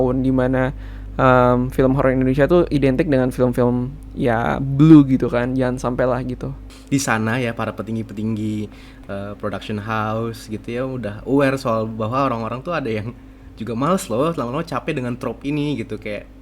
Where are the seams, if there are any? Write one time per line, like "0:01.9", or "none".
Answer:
0:06.6